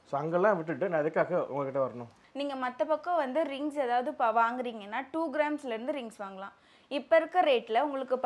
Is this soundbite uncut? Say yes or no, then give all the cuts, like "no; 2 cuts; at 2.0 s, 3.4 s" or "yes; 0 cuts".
yes; 0 cuts